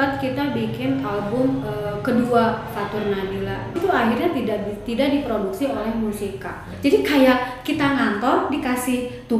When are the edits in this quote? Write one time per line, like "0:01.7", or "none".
0:03.8
0:06.7